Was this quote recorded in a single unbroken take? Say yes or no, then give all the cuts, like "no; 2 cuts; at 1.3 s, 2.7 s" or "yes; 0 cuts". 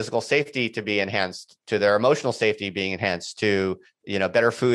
yes; 0 cuts